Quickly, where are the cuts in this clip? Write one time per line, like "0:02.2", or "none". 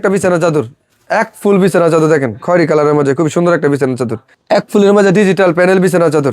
0:04.3